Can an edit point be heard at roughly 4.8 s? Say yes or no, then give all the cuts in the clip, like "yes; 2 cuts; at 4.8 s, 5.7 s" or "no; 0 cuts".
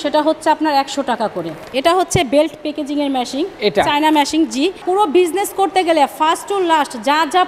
yes; 2 cuts; at 1.7 s, 4.8 s